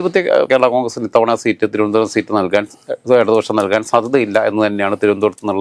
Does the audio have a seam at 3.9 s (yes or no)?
no